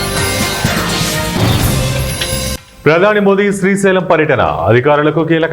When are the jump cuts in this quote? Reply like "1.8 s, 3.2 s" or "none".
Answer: 2.6 s